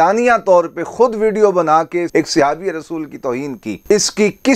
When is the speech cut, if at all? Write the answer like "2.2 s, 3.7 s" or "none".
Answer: 2.1 s